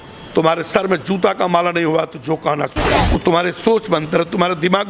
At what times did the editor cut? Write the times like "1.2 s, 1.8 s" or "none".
2.9 s